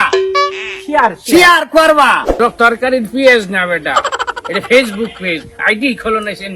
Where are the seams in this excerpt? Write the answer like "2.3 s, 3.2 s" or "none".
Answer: 2.3 s

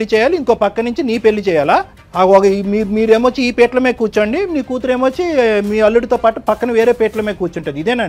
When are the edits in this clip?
2.0 s

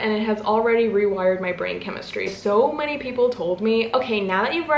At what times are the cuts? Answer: 2.3 s

